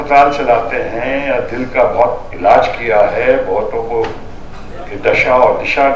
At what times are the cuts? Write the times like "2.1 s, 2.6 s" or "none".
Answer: none